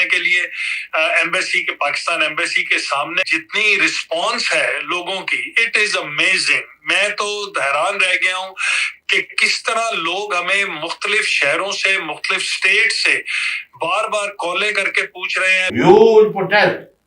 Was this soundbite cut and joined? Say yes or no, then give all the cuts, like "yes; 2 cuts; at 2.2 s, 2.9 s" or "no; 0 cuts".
yes; 2 cuts; at 3.3 s, 15.6 s